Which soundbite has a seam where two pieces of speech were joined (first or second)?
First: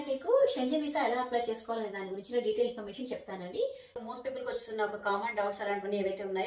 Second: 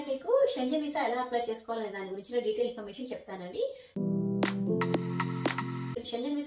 first